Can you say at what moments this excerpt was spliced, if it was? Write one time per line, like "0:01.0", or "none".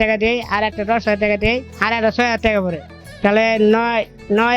none